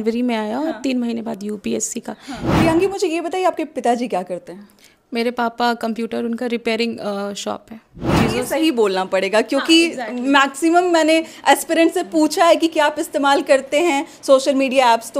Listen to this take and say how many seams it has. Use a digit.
2